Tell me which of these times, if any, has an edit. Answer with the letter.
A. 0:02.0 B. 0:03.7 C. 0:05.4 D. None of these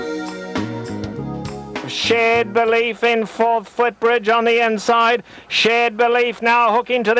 A